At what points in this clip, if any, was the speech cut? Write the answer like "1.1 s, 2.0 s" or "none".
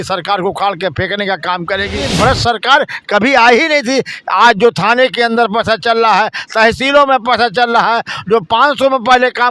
2.1 s